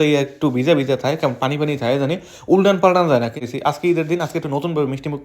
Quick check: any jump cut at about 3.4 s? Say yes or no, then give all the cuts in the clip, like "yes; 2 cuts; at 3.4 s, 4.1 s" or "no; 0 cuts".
yes; 1 cut; at 3.4 s